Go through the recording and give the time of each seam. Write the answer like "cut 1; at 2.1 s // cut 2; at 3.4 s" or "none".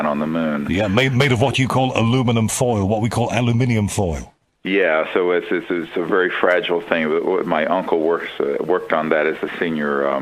none